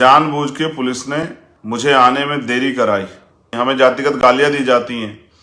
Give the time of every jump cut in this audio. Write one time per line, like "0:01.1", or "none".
0:01.5
0:03.5